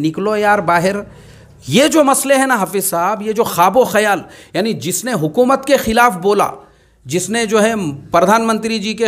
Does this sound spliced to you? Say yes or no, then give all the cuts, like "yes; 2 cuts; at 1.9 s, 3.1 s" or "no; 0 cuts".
no; 0 cuts